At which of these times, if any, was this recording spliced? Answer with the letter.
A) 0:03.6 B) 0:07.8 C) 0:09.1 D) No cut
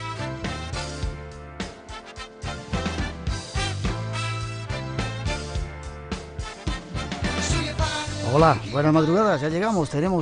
C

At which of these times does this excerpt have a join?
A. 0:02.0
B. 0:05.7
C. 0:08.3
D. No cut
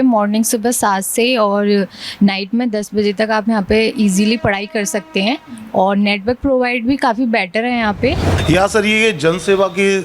C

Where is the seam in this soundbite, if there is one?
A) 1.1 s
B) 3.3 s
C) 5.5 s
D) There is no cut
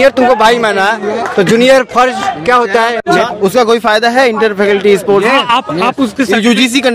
B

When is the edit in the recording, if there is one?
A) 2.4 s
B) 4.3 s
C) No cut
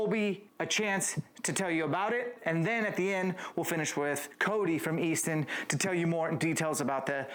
A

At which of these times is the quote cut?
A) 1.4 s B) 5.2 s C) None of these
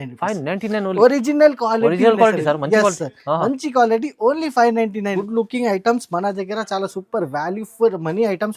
B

